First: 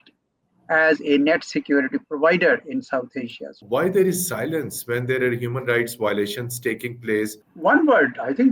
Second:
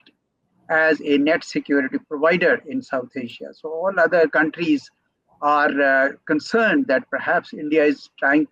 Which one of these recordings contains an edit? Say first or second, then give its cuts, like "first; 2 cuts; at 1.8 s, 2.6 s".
first; 2 cuts; at 3.6 s, 7.4 s